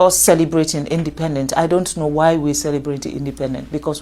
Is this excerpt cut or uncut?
uncut